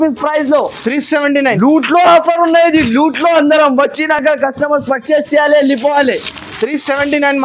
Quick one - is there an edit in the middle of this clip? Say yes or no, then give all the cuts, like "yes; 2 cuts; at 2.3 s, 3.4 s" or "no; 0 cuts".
no; 0 cuts